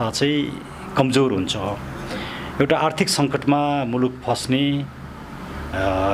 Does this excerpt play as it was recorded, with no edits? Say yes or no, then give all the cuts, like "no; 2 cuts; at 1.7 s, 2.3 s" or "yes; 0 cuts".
yes; 0 cuts